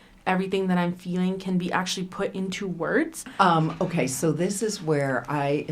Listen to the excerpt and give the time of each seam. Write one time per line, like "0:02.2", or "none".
0:03.2